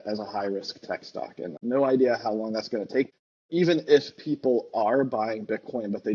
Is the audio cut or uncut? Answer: cut